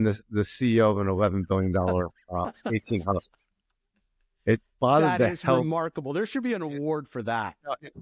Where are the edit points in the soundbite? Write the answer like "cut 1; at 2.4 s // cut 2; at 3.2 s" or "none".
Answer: none